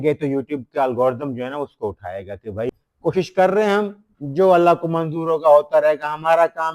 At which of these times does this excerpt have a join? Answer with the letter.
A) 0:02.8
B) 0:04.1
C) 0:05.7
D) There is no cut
A